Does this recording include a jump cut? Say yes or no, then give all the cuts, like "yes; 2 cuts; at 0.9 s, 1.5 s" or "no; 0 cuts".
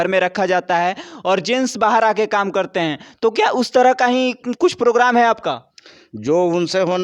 no; 0 cuts